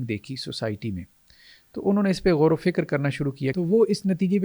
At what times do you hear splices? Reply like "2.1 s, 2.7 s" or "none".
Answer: 3.5 s